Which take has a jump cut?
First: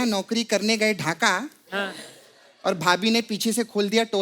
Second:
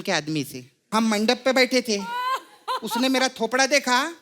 second; 1 cut; at 0.9 s

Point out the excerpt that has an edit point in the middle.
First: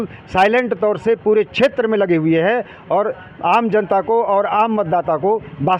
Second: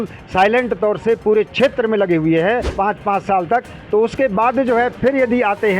second; 1 cut; at 2.7 s

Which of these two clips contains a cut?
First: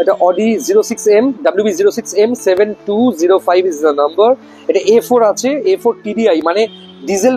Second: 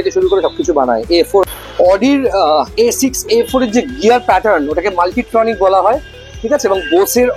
second; 1 cut; at 1.5 s

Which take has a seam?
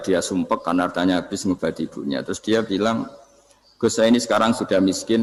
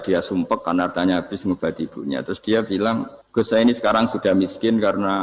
second; 1 cut; at 3.2 s

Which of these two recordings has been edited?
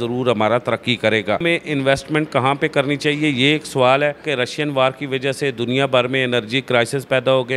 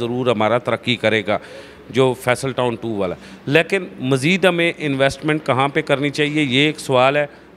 first; 2 cuts; at 1.4 s, 4.2 s

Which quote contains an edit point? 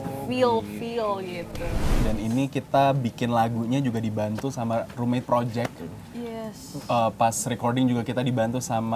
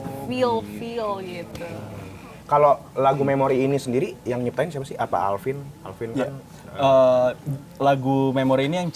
first; 1 cut; at 2.0 s

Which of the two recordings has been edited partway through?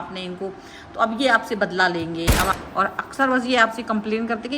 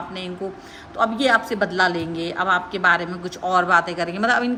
first; 1 cut; at 2.5 s

